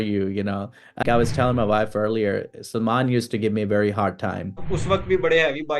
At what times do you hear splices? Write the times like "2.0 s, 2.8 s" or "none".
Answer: 1.0 s, 4.7 s